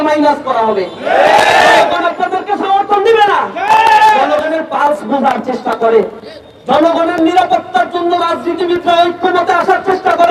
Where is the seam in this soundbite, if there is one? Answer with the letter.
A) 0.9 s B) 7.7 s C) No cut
C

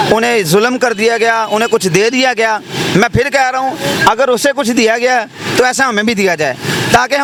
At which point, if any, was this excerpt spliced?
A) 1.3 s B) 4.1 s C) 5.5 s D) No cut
D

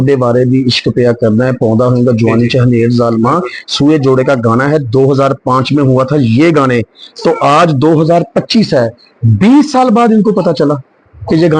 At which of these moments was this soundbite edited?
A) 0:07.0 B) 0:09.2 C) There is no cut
C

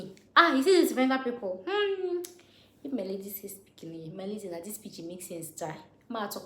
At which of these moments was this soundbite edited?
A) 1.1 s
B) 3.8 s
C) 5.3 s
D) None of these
D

